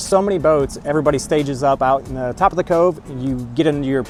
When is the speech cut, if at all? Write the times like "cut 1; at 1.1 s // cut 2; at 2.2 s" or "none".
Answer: none